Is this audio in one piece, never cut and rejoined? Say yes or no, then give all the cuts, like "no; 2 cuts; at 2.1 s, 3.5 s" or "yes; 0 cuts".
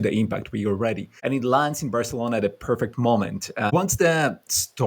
no; 2 cuts; at 1.1 s, 3.7 s